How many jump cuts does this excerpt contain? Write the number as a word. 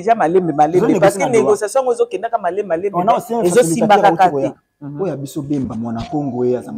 one